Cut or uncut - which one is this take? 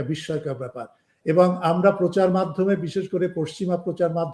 uncut